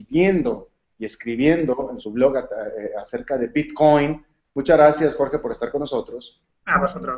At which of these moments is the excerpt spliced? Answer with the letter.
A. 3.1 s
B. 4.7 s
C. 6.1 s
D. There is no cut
D